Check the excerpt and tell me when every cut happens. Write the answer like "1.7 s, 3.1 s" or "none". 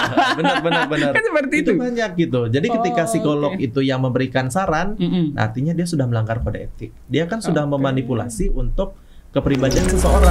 none